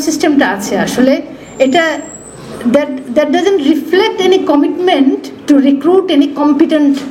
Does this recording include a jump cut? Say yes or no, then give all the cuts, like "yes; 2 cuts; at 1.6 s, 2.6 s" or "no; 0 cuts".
no; 0 cuts